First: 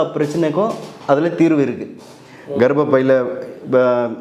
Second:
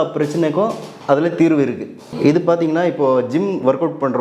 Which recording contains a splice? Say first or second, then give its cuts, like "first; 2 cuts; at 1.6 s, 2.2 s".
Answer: second; 1 cut; at 2.0 s